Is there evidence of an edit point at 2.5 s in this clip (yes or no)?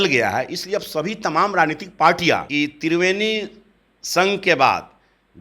yes